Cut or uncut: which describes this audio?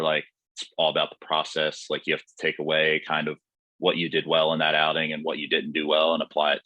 uncut